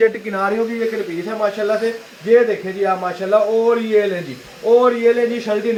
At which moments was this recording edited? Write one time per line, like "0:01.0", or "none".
none